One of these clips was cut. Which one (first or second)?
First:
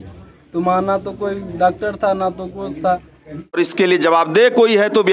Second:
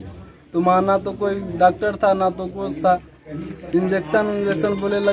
first